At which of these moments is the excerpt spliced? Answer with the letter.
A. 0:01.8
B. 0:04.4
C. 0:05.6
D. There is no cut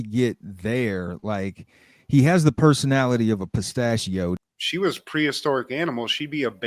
B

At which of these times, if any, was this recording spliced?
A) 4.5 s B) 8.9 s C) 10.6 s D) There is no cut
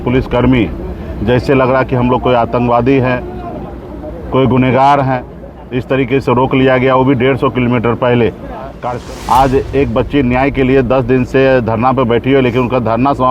B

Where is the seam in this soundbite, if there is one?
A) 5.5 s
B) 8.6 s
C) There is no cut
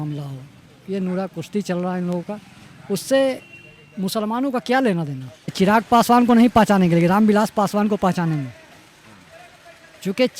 A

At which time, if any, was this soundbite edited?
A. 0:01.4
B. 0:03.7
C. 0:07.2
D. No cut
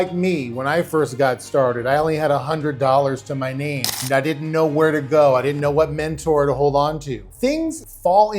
C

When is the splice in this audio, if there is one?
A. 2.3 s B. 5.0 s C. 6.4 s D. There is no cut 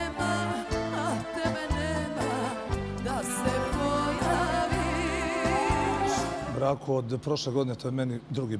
C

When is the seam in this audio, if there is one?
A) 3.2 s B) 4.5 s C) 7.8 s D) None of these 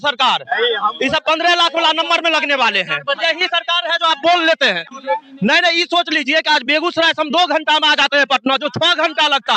A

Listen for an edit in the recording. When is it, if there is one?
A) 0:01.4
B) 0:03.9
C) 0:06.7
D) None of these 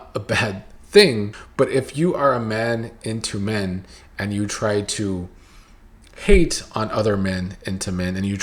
A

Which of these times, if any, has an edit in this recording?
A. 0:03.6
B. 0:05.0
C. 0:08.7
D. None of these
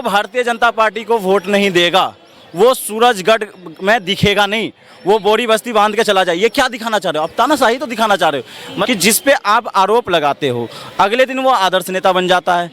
C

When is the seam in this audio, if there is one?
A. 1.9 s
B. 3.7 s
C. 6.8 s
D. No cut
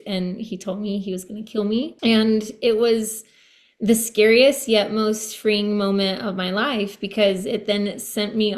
A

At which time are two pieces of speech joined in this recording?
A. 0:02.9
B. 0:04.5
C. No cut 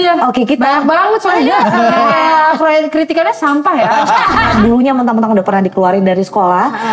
B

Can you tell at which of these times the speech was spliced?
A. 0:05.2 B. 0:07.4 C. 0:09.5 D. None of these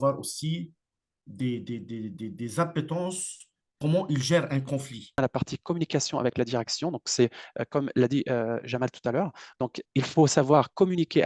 A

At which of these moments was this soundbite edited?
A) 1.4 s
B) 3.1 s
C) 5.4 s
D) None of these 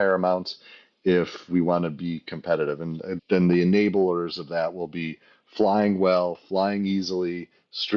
B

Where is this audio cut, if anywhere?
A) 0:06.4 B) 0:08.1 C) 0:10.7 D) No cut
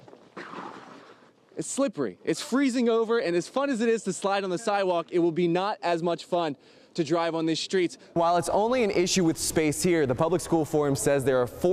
B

